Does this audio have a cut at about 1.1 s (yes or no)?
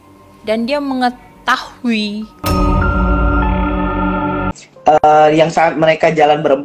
no